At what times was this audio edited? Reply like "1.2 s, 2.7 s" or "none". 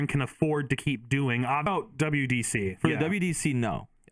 1.7 s